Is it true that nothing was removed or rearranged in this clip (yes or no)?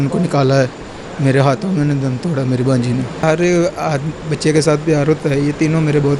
no